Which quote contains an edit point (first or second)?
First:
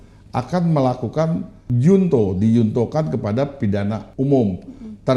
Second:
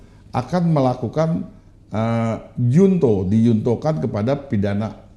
first